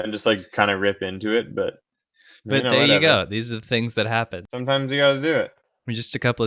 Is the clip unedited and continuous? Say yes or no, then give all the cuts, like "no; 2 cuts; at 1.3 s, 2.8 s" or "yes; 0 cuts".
no; 1 cut; at 4.4 s